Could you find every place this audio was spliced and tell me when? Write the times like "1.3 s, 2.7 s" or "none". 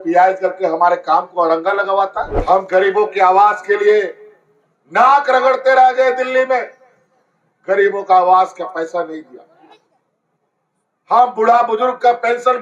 2.3 s

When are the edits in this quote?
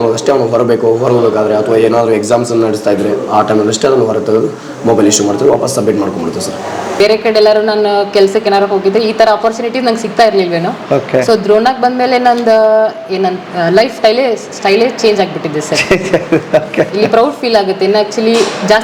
7.0 s

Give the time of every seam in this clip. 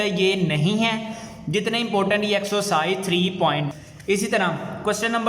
3.7 s

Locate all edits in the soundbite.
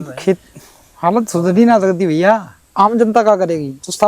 2.6 s

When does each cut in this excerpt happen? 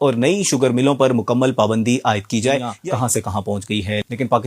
2.7 s

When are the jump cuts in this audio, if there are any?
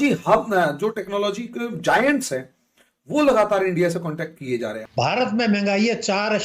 4.8 s

